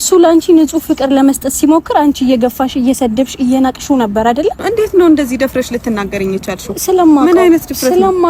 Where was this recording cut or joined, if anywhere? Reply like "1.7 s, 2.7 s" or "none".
4.6 s